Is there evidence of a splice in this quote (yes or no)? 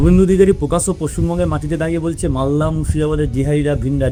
no